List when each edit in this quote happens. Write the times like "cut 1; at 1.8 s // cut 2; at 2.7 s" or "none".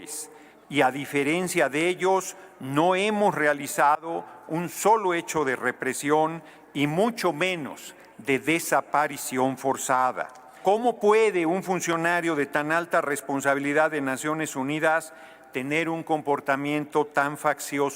cut 1; at 10.5 s